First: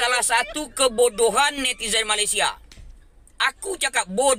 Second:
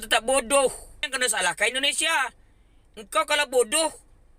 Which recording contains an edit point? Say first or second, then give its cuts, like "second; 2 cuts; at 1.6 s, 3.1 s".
second; 1 cut; at 1.1 s